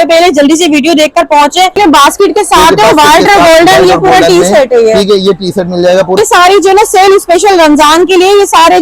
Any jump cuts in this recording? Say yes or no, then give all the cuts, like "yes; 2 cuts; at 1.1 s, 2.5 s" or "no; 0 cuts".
yes; 2 cuts; at 1.7 s, 6.2 s